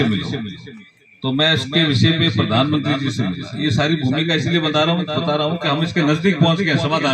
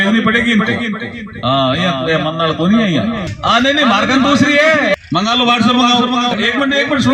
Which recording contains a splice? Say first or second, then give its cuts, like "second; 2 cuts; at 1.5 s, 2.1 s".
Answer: second; 3 cuts; at 3.3 s, 5.0 s, 6.4 s